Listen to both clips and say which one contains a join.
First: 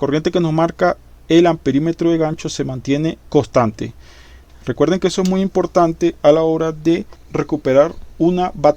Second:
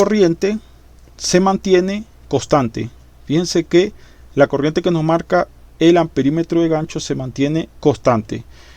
first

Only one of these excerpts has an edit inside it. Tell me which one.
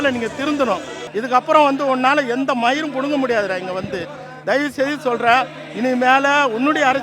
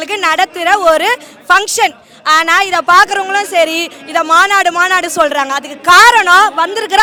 first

